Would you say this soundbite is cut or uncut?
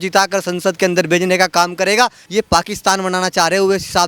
cut